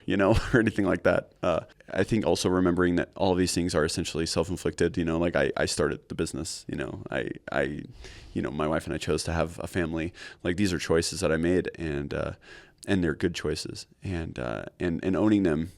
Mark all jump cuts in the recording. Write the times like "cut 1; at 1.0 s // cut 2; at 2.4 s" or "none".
cut 1; at 1.8 s